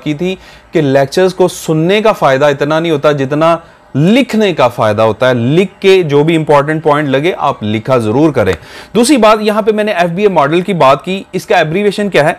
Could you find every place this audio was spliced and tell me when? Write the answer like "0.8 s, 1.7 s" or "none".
none

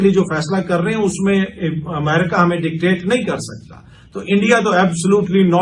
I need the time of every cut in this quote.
none

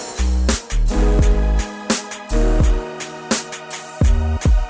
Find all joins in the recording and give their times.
3.4 s

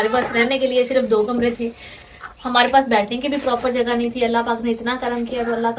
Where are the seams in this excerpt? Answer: none

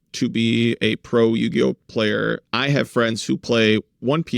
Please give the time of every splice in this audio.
2.4 s

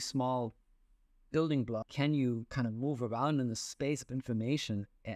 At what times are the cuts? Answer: 1.9 s

